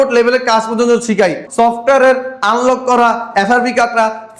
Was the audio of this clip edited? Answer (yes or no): yes